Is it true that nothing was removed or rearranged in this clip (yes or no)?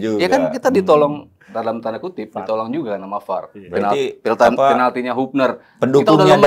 yes